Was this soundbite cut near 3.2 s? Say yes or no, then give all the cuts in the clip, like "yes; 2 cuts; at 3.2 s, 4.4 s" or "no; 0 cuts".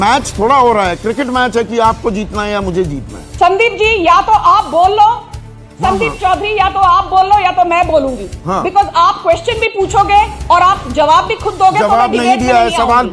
yes; 1 cut; at 3.2 s